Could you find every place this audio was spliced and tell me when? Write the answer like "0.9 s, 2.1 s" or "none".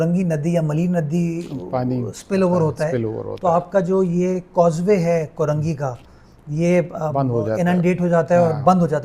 none